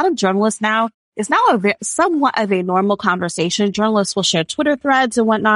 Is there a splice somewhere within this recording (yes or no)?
no